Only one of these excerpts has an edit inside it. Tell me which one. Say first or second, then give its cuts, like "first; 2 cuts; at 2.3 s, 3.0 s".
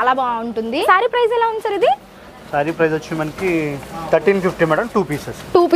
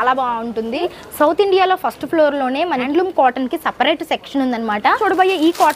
second; 3 cuts; at 0.8 s, 2.8 s, 4.9 s